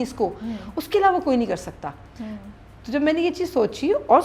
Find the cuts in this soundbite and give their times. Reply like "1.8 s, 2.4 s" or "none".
none